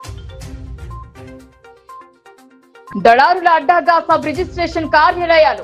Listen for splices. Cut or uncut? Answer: cut